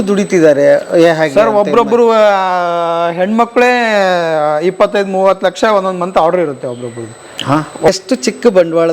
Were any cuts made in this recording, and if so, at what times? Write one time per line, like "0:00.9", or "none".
0:07.9